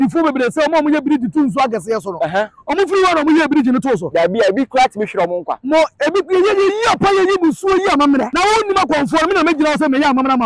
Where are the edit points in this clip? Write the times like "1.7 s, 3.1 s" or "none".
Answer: 8.3 s